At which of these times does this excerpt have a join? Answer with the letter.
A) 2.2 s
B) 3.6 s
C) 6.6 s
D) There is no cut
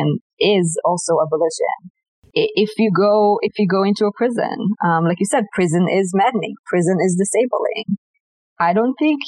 A